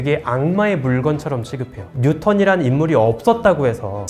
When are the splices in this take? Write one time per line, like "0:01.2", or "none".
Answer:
0:01.8